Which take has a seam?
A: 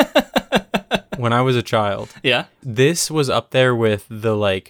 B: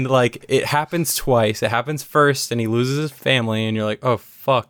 B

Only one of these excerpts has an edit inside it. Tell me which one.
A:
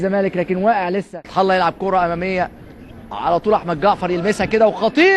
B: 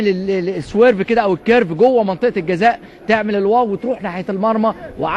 A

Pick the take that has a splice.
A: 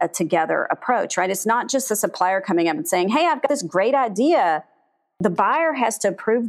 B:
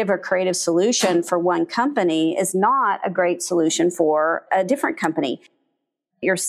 B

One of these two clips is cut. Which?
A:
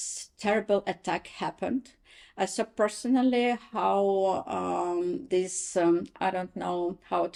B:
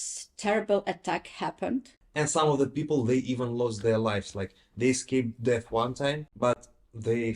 B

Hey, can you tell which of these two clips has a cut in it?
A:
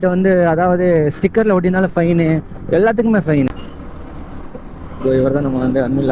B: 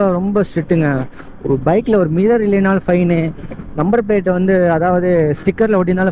A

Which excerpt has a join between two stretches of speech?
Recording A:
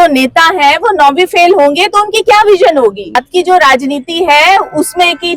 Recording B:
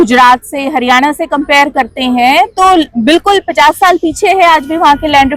A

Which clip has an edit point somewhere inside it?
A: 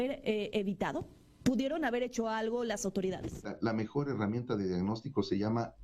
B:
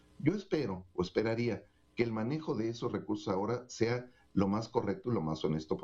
A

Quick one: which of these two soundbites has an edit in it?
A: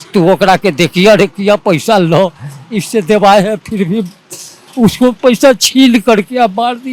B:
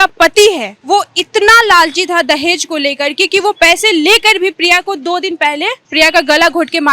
B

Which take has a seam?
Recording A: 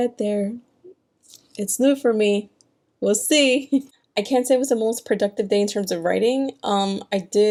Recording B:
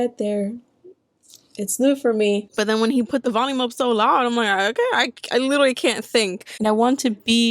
B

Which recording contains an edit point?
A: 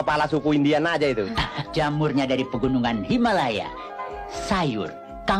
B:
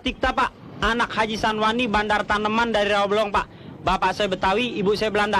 A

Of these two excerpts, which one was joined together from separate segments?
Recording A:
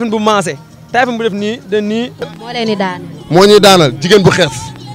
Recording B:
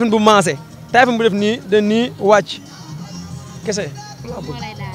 A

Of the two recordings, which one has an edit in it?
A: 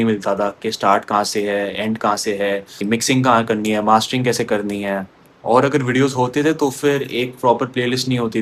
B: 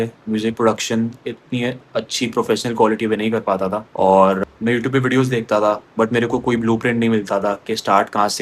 B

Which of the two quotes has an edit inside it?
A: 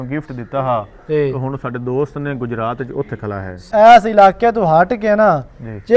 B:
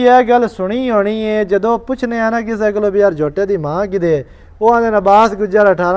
A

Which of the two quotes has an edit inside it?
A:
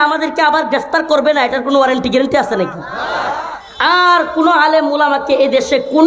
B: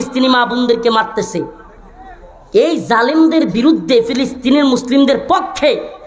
A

